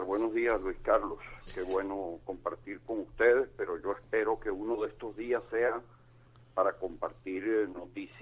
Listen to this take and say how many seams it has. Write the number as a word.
one